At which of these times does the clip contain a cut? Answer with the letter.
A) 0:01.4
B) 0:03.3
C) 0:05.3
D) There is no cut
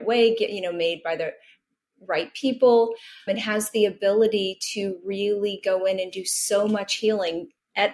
B